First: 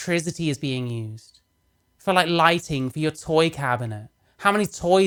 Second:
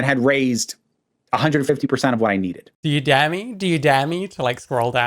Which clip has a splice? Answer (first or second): second